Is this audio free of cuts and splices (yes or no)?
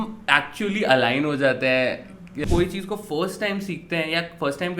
no